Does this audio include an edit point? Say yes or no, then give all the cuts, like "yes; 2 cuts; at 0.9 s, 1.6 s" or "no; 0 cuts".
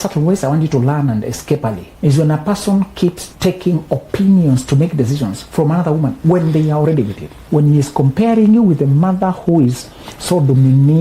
yes; 3 cuts; at 1.9 s, 3.3 s, 7.4 s